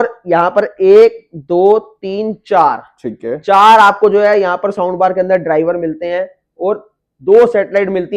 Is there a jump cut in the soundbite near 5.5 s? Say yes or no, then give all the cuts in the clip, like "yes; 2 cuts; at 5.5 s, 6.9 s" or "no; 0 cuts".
no; 0 cuts